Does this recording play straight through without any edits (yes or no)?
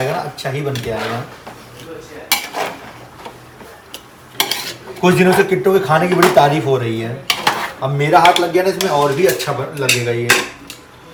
yes